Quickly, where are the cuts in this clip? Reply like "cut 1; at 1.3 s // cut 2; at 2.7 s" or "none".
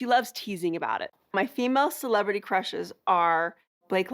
cut 1; at 1.2 s